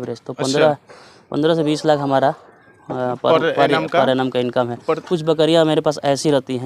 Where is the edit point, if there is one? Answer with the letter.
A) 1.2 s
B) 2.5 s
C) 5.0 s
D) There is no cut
C